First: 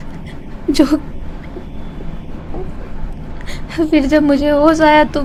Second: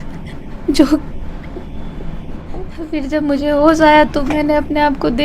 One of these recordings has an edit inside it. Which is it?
second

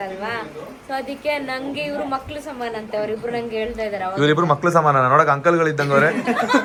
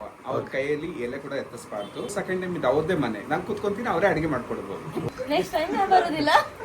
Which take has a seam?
second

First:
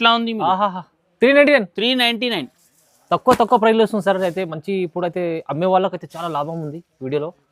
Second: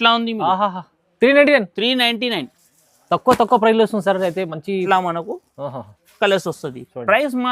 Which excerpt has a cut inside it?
second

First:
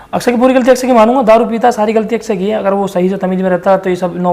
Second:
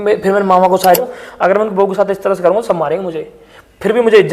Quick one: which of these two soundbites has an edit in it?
second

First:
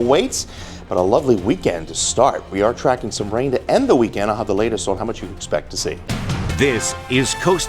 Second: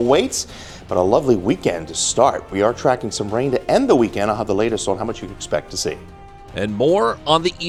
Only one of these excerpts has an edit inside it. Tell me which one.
first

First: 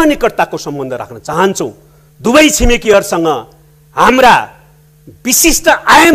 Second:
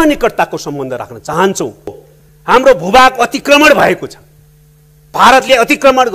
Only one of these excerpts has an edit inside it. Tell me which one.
second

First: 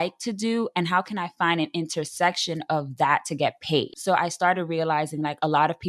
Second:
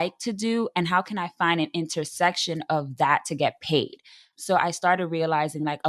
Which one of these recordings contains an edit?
first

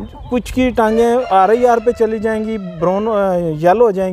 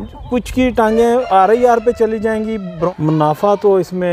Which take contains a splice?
second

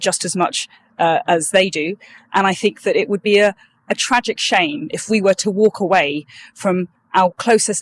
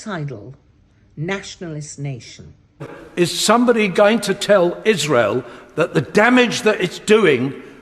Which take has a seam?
second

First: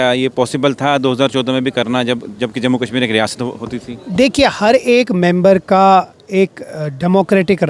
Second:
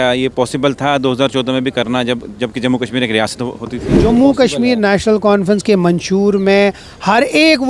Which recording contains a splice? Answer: second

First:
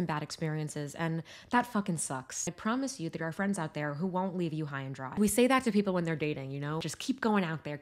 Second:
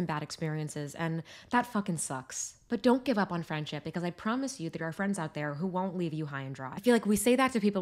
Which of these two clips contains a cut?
first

